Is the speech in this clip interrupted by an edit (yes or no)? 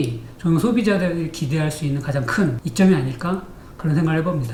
no